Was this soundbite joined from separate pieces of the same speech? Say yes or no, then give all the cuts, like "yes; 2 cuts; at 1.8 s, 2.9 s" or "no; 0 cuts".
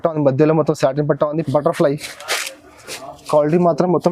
yes; 1 cut; at 1.4 s